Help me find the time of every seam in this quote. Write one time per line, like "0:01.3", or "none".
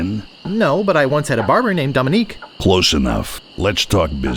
0:02.4
0:03.4

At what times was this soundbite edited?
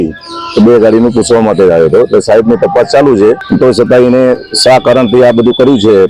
0:03.4

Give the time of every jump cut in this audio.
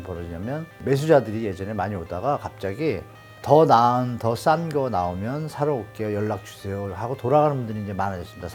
none

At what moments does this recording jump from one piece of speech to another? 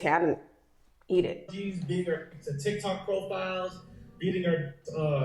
0:01.5

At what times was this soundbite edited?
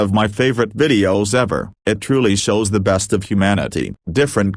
none

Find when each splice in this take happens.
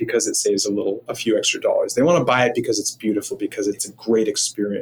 0:03.9

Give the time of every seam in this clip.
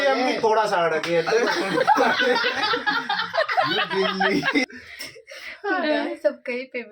0:04.6

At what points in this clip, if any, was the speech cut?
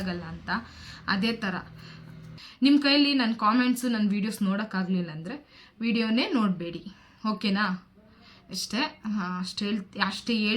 0:02.3

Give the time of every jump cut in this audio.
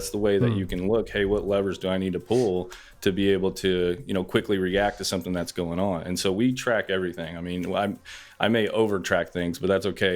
none

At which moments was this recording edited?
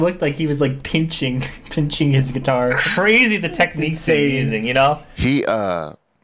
0:05.1

